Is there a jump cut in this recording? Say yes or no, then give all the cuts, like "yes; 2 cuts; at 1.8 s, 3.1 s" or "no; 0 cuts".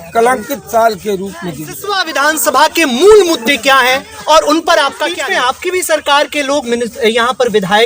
yes; 2 cuts; at 1.9 s, 5.1 s